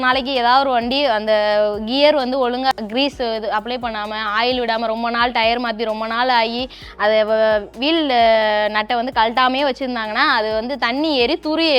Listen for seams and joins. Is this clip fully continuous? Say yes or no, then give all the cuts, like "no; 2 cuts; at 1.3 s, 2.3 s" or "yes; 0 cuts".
no; 1 cut; at 2.7 s